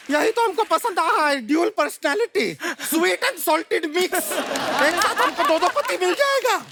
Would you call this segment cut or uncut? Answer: uncut